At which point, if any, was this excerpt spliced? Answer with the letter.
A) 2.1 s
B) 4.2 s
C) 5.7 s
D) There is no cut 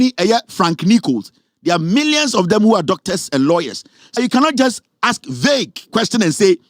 B